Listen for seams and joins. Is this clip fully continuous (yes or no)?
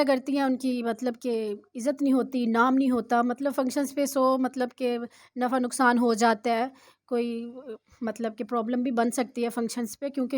yes